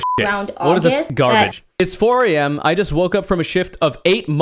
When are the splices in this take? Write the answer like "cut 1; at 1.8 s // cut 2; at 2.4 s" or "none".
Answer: cut 1; at 1.1 s